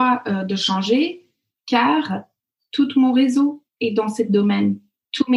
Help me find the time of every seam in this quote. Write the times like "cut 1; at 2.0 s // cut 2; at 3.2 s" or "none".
none